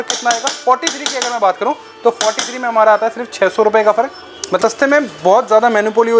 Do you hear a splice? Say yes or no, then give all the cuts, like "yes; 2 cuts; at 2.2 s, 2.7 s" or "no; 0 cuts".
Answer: yes; 1 cut; at 4.6 s